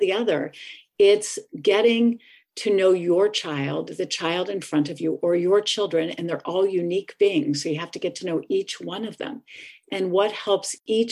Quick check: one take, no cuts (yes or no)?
yes